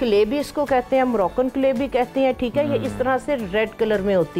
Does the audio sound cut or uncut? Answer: uncut